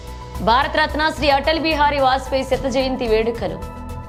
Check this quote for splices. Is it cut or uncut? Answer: uncut